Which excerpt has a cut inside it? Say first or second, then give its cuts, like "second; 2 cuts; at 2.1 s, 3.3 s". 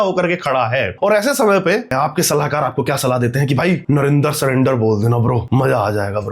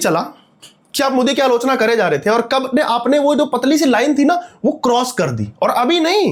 first; 4 cuts; at 0.9 s, 1.9 s, 3.8 s, 5.4 s